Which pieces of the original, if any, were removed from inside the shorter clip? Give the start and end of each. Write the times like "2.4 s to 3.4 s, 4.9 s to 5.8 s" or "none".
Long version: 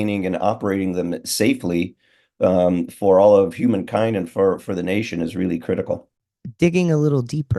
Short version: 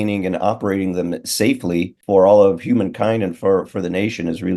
2.0 s to 2.9 s